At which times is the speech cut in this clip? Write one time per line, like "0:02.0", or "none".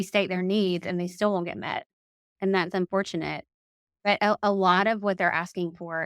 0:03.9